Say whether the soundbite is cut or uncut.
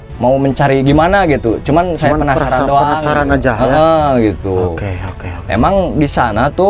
uncut